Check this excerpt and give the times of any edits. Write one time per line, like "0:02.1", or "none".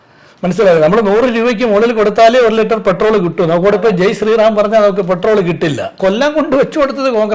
0:06.0